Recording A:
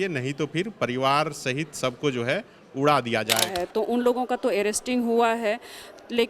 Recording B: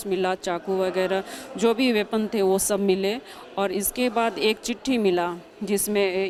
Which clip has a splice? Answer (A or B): A